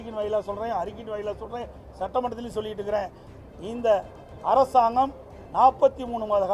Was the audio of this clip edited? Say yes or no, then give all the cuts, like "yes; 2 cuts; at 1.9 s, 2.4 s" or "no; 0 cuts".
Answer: no; 0 cuts